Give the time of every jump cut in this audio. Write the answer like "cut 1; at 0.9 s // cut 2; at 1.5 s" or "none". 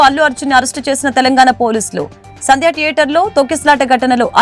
none